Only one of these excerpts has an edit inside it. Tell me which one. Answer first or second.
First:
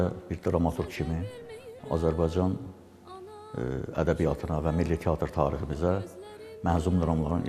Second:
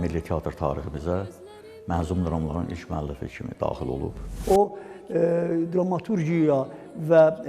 second